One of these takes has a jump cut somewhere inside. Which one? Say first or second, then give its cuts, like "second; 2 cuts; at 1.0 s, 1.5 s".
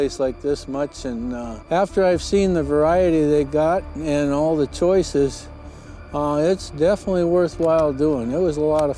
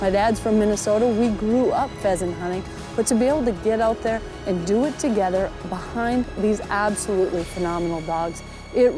first; 1 cut; at 1.5 s